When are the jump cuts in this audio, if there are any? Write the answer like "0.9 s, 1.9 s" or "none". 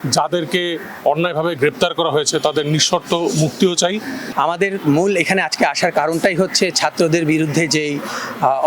4.2 s